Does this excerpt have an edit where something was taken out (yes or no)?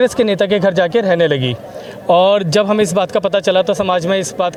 no